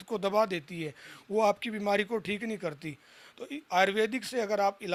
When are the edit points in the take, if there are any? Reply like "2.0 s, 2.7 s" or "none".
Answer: none